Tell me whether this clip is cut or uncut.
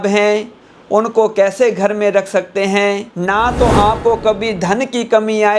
cut